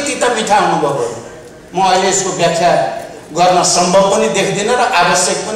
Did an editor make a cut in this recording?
no; 0 cuts

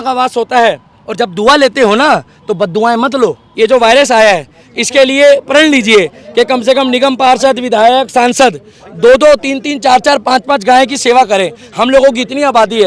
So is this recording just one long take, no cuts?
no; 1 cut; at 3.4 s

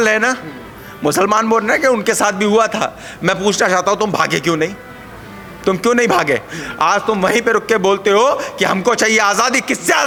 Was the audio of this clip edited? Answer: no; 0 cuts

